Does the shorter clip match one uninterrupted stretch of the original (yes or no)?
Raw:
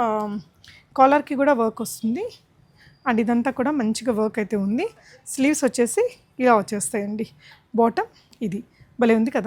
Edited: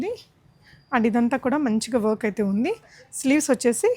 yes